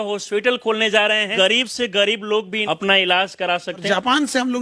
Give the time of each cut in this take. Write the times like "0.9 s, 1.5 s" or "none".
1.3 s, 2.6 s, 3.8 s